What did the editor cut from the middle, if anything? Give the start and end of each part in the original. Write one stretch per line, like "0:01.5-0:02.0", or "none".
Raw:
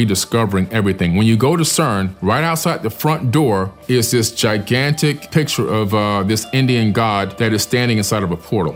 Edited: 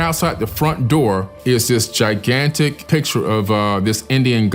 none

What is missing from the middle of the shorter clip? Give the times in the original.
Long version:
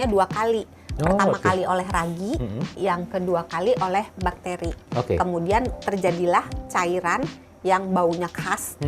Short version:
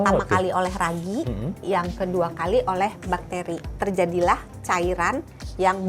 0:04.8-0:05.8

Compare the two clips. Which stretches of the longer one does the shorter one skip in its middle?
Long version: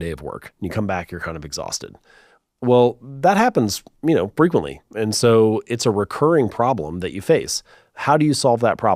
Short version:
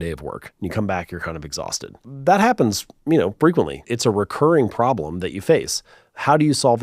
0:02.1-0:03.1
0:04.8-0:05.7

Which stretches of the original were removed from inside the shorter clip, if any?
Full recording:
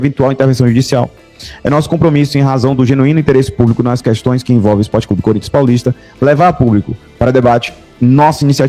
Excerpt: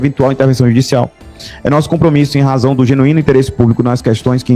none

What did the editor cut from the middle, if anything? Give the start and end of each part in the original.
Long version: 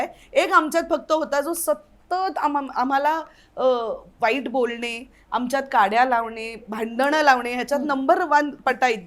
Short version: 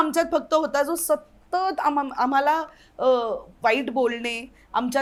none

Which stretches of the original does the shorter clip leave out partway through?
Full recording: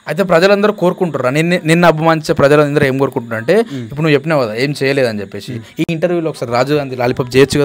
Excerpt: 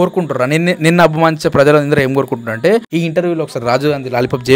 0:03.7-0:05.8

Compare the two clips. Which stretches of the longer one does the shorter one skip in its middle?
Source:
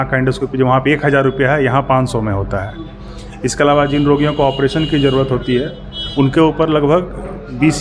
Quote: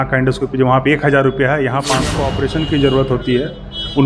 0:02.1-0:04.3

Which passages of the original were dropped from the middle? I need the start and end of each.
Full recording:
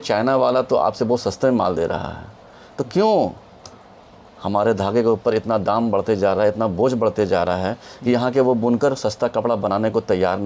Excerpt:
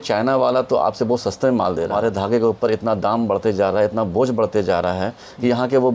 0:01.9-0:04.5

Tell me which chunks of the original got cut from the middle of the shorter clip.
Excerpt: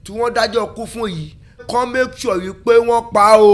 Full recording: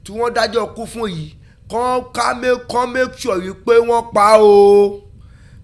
0:01.6-0:02.6

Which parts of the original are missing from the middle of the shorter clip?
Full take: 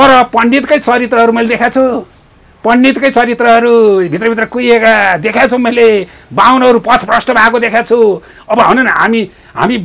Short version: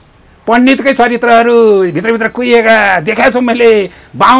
none

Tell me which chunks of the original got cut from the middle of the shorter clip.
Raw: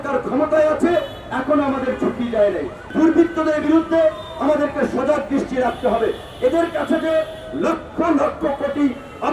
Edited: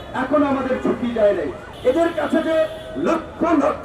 0:02.8-0:06.2

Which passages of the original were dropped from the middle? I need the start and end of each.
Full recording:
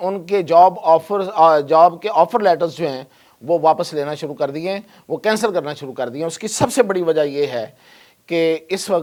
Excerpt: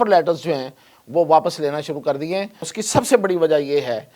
0:05.0-0:06.3

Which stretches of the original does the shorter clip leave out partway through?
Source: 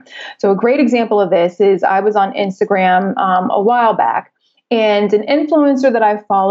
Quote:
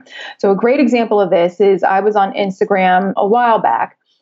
0:03.1-0:03.5

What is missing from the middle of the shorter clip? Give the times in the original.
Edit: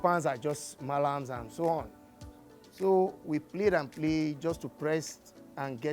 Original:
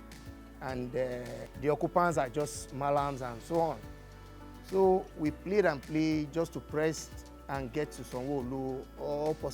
none

